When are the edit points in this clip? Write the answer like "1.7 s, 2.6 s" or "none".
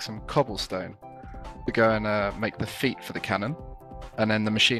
none